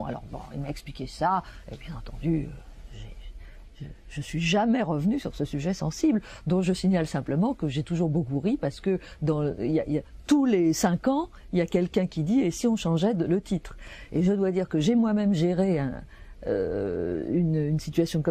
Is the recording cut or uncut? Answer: cut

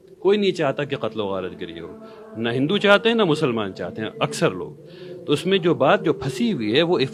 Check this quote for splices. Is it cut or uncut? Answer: uncut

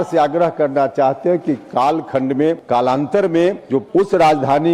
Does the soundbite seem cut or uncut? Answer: cut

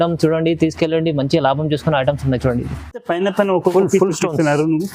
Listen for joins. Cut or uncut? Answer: cut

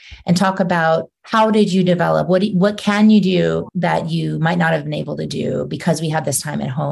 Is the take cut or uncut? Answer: cut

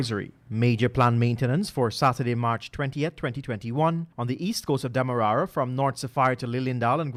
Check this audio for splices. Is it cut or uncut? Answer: uncut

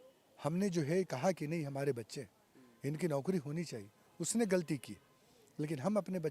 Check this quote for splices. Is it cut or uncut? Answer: uncut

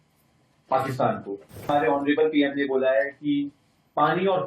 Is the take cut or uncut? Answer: cut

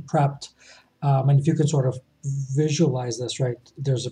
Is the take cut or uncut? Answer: uncut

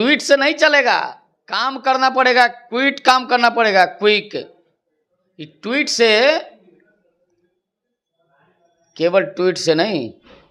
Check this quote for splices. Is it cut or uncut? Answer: uncut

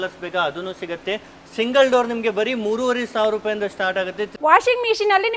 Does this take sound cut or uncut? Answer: cut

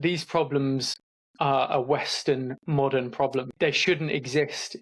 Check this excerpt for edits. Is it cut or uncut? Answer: cut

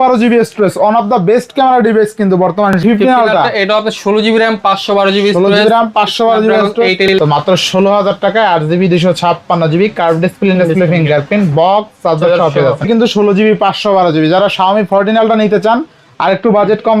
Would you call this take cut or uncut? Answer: cut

